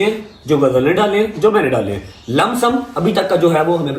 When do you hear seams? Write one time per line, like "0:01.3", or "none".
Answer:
none